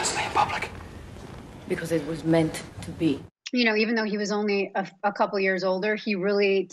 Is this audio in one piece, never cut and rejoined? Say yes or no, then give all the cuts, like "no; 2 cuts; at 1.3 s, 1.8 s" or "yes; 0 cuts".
no; 1 cut; at 3.3 s